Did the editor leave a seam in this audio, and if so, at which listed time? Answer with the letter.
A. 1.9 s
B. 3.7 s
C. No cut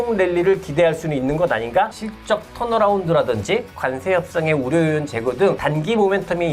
A